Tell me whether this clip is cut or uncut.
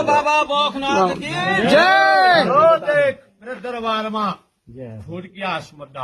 cut